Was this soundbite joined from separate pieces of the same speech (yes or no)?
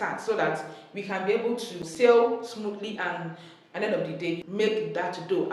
yes